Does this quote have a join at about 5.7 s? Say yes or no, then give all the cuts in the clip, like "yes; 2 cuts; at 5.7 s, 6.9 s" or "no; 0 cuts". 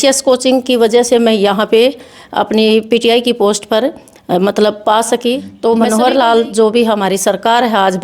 yes; 1 cut; at 5.7 s